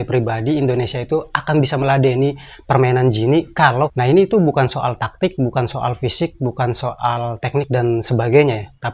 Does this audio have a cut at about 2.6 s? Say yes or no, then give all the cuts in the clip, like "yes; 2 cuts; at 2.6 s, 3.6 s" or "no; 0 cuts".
no; 1 cut; at 3.9 s